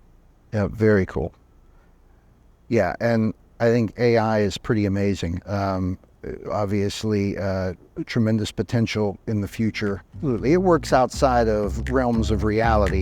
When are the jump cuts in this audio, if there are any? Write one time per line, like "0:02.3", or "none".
0:10.3